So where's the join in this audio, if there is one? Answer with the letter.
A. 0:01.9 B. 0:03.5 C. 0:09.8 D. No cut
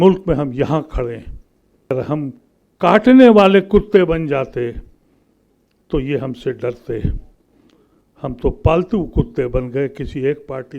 A